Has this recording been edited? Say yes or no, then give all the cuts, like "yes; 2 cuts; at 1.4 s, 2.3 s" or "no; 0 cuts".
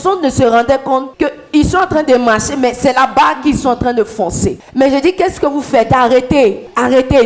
no; 0 cuts